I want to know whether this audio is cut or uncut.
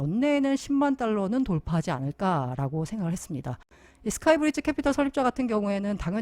cut